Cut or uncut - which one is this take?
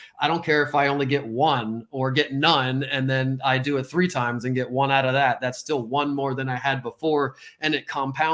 uncut